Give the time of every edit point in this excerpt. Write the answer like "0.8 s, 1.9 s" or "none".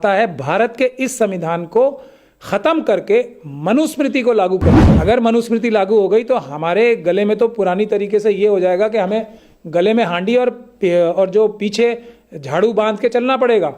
4.9 s